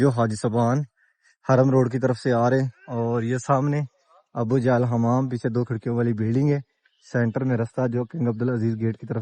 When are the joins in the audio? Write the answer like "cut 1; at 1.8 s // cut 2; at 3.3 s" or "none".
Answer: none